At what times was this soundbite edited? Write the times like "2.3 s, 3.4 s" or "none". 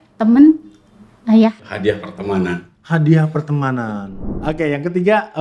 1.7 s, 4.0 s